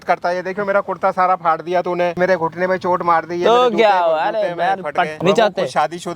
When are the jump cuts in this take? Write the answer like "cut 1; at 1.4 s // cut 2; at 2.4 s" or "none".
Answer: cut 1; at 2.2 s // cut 2; at 5.1 s